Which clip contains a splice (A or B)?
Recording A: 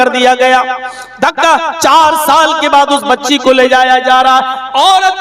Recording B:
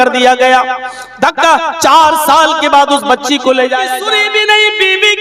B